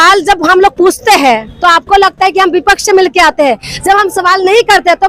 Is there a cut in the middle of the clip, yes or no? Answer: no